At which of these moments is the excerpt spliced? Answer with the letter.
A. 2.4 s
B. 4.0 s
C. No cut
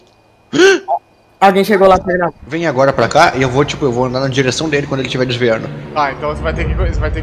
A